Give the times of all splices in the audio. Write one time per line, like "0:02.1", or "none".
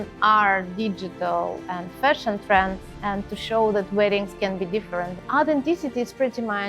0:01.6
0:02.9
0:05.2